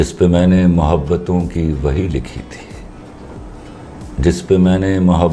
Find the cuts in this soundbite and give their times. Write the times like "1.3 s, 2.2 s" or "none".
none